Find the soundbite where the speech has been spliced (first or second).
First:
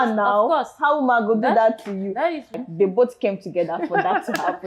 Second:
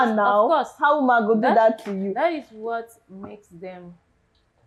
first